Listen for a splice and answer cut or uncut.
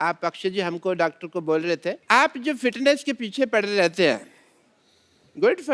cut